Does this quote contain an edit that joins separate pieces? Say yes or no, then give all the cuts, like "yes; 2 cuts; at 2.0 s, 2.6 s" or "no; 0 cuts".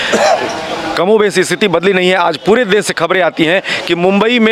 no; 0 cuts